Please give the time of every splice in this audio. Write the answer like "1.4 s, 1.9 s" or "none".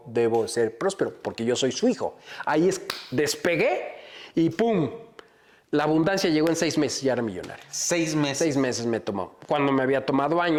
none